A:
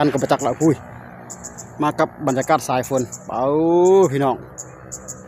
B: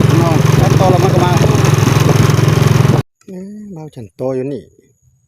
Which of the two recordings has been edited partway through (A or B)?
B